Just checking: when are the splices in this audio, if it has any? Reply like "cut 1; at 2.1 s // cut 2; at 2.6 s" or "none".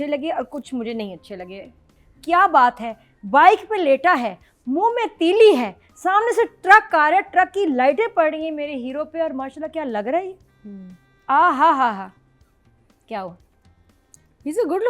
cut 1; at 1.9 s